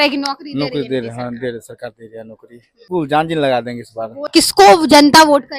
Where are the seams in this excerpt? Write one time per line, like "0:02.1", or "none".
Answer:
0:02.9
0:04.3